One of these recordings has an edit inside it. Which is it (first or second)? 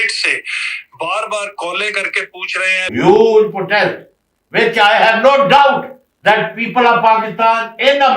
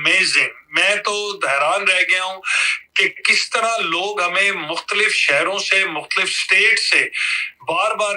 first